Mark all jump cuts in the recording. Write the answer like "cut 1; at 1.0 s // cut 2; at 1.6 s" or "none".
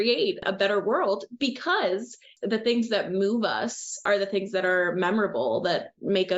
cut 1; at 2.3 s // cut 2; at 4.0 s